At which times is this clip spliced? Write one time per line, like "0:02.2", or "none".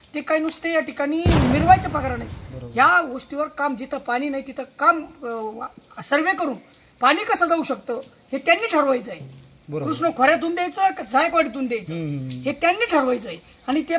none

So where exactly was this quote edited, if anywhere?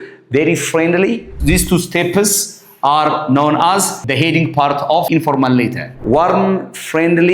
0:01.3
0:04.0
0:05.1
0:05.9

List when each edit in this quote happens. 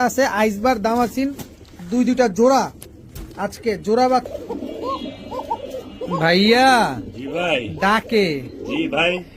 0:04.3

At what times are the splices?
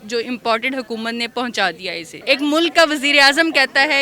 0:02.1

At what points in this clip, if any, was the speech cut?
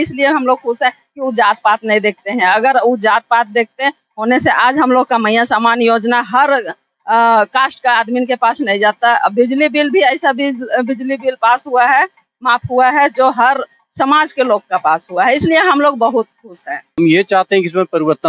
0:16.8

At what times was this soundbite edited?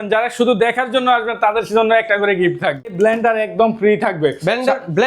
0:02.9

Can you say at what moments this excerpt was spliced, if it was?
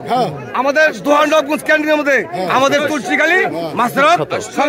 none

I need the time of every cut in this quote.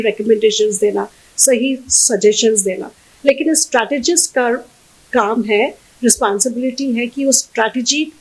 none

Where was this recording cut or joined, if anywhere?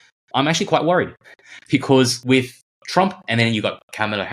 0:02.6

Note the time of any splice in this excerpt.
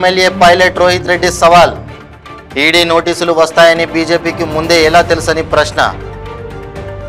none

